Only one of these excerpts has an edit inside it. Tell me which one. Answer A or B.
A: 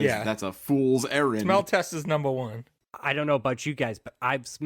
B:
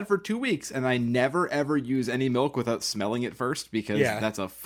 A